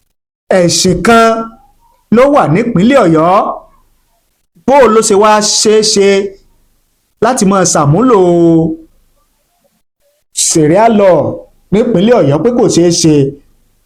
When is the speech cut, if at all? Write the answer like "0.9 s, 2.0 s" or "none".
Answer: none